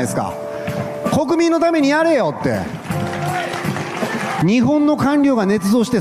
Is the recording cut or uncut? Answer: cut